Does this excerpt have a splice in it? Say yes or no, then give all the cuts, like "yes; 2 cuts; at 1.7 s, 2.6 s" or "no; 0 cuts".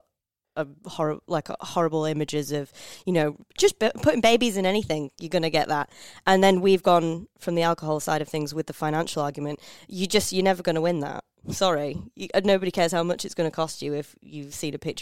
no; 0 cuts